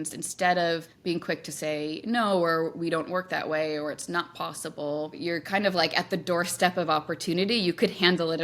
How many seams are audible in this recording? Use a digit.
2